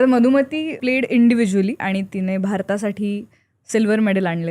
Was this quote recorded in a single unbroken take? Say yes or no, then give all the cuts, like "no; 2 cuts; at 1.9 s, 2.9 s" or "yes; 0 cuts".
no; 2 cuts; at 0.8 s, 1.8 s